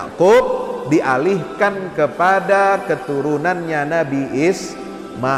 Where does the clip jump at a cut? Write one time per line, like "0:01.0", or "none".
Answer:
none

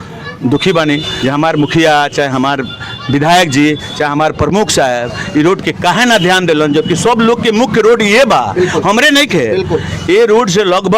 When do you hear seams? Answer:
0:01.1

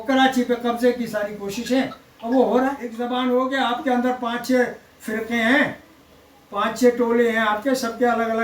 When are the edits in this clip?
0:02.9

